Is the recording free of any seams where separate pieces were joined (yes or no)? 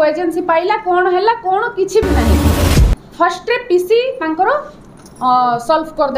no